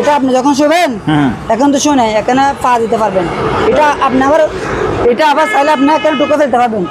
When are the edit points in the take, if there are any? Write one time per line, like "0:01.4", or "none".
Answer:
none